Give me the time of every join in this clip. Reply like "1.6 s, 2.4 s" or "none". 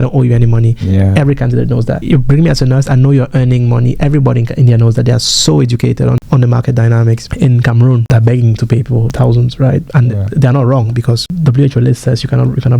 none